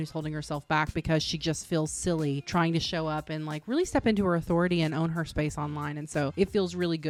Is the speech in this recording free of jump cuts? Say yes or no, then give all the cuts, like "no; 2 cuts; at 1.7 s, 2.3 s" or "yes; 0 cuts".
yes; 0 cuts